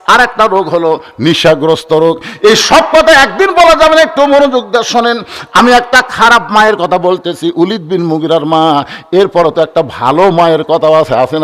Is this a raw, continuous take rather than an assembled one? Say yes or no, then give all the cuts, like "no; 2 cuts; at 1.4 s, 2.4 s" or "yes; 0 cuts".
yes; 0 cuts